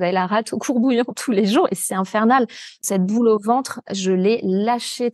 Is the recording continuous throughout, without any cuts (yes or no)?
no